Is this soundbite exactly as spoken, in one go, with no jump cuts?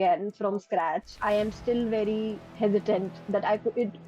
no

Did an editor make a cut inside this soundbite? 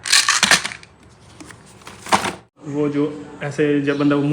yes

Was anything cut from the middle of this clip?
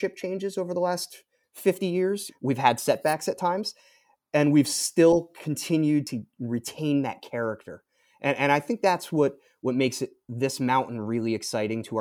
yes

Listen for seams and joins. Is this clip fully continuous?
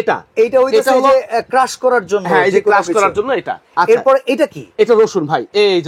no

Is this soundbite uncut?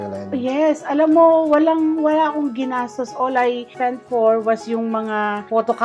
yes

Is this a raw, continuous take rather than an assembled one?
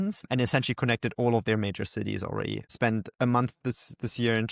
no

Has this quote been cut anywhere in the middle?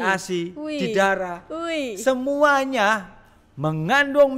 no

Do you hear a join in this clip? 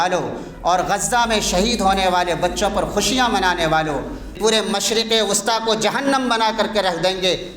yes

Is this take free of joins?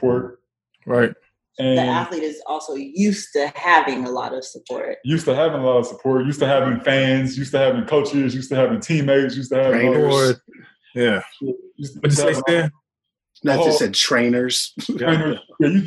yes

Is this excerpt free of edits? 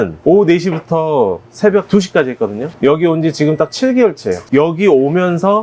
no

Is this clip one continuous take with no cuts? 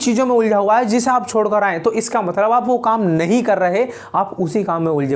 yes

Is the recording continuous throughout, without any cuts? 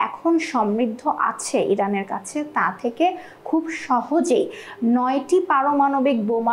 yes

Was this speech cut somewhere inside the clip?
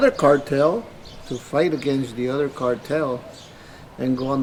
no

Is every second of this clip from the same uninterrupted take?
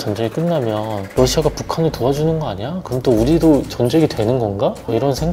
yes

